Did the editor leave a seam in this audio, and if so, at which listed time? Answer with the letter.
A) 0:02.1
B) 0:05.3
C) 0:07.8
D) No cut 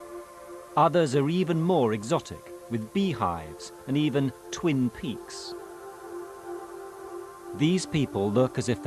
B